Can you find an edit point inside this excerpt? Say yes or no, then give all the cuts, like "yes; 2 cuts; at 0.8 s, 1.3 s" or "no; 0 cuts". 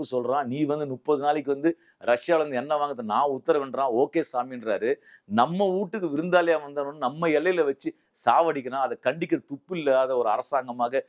no; 0 cuts